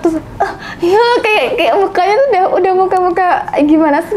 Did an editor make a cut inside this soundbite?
no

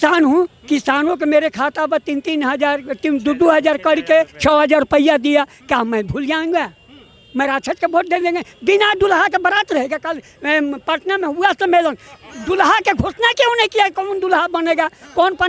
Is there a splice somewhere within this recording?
no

